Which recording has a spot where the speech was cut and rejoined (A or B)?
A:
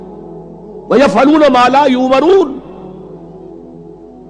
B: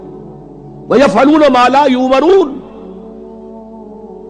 B